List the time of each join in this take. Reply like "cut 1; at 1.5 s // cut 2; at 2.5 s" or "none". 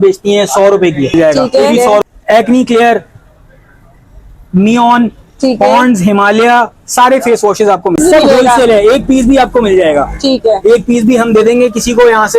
cut 1; at 2.0 s // cut 2; at 8.0 s